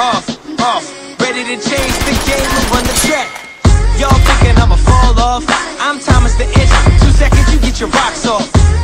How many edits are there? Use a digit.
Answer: 0